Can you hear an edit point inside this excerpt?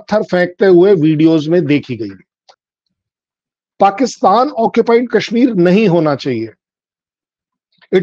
yes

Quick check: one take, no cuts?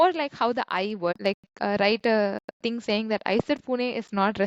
no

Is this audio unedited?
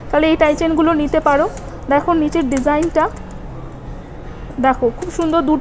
yes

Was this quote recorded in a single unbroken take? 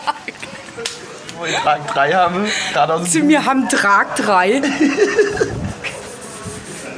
no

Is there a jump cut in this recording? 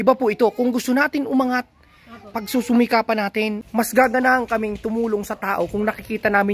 yes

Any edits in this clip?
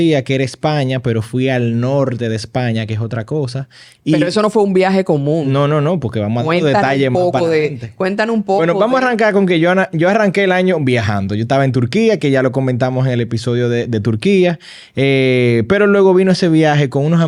no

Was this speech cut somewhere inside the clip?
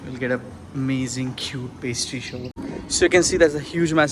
yes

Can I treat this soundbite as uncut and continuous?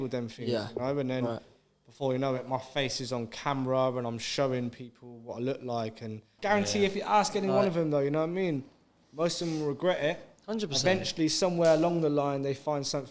no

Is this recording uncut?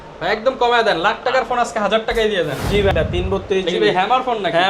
no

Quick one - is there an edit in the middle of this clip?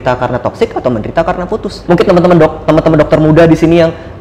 yes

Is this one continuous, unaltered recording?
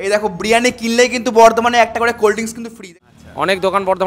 no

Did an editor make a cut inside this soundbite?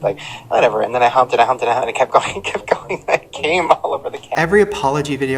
yes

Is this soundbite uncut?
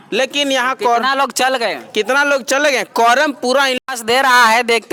yes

